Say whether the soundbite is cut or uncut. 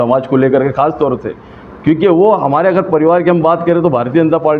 uncut